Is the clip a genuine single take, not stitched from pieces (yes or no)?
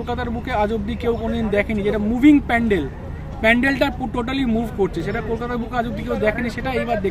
yes